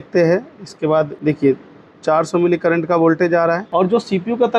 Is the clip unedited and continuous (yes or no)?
no